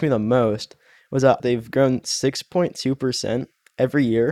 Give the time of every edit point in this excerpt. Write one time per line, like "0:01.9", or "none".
0:01.2